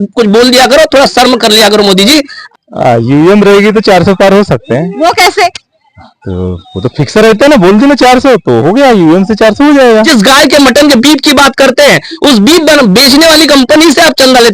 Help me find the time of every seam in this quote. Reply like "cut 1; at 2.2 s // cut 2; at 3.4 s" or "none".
cut 1; at 2.4 s // cut 2; at 10.1 s